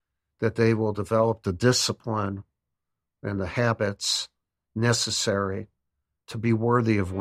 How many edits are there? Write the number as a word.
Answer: one